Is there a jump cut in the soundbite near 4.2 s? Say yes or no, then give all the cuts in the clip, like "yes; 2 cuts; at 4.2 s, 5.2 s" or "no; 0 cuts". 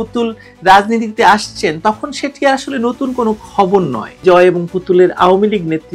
yes; 1 cut; at 4.2 s